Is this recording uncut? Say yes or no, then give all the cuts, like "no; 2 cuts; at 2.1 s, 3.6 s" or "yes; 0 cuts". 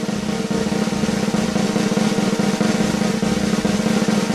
yes; 0 cuts